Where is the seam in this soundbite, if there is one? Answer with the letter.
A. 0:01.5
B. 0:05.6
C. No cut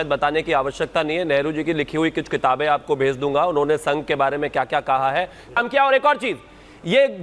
B